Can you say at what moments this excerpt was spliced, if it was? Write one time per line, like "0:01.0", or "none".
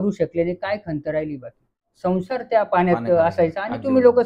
0:01.9